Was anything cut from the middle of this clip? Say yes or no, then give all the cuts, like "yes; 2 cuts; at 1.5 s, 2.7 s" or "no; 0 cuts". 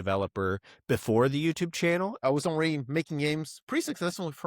yes; 1 cut; at 2.2 s